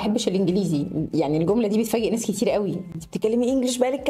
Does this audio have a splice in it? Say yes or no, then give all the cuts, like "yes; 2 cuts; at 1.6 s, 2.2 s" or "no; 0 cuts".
no; 0 cuts